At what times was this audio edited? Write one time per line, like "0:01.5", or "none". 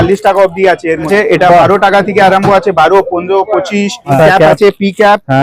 0:01.1
0:04.2

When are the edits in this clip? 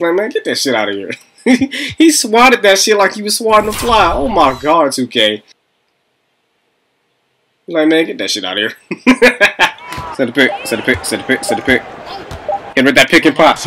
0:09.8

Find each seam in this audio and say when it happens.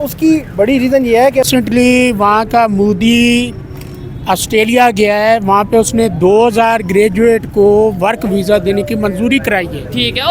0:01.5

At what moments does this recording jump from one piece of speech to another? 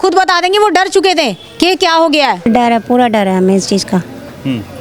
0:02.5

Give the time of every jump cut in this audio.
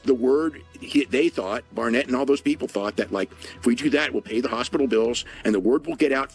none

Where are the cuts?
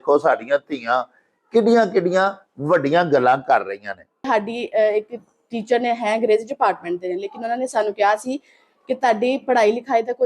0:04.3

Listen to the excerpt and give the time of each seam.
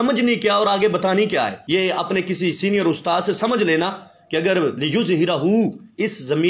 0:01.6

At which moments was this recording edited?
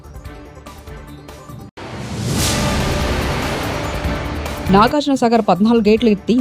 0:04.6

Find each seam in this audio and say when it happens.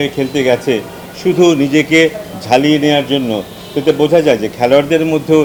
none

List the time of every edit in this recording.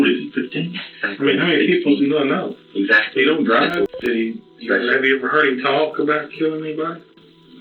0:03.9

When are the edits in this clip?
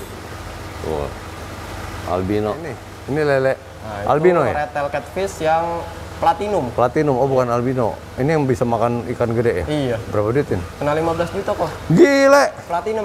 0:02.9

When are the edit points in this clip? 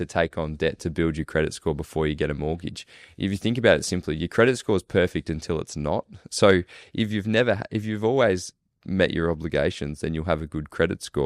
none

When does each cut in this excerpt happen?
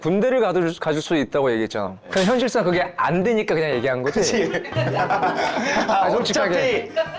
none

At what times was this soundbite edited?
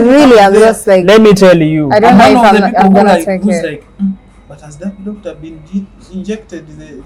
none

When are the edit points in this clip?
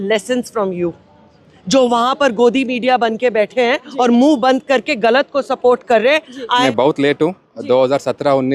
0:06.7

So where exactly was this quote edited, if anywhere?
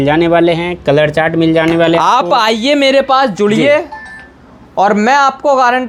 none

